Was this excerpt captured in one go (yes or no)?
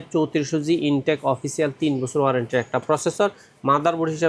yes